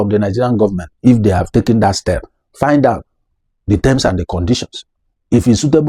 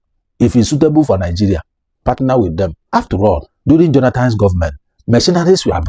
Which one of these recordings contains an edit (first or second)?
second